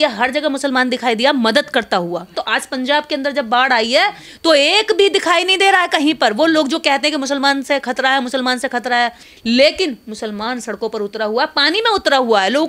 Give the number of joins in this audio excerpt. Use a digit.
2